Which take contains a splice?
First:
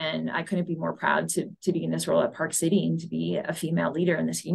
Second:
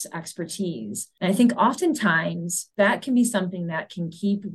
second; 1 cut; at 1.0 s

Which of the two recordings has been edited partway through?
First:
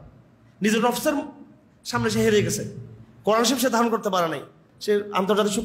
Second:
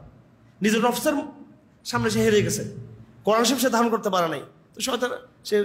first; 1 cut; at 4.6 s

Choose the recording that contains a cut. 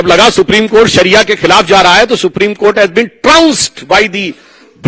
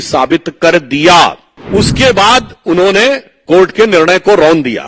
second; 1 cut; at 1.5 s

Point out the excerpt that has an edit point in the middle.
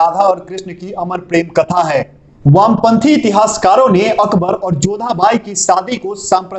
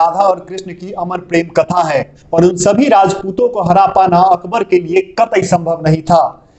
second; 1 cut; at 2.2 s

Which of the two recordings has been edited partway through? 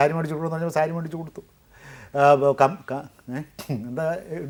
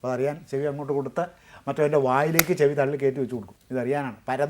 second; 1 cut; at 3.5 s

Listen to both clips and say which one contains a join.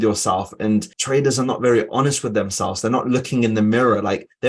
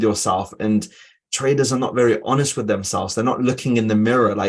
first; 1 cut; at 1.0 s

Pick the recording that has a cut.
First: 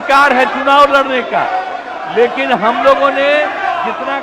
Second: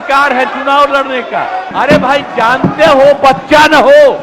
second; 1 cut; at 1.7 s

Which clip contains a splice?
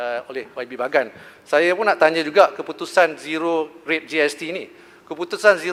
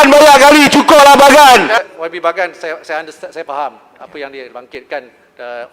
second; 1 cut; at 1.7 s

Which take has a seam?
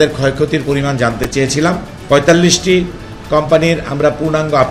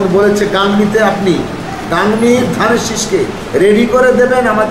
first; 1 cut; at 1.9 s

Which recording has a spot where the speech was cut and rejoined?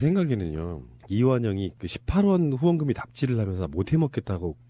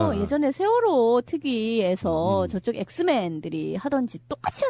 first; 1 cut; at 1.2 s

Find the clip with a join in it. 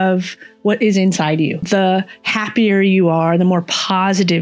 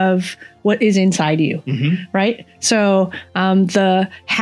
first; 1 cut; at 1.7 s

